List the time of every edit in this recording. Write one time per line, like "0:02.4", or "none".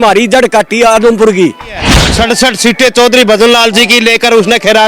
0:02.0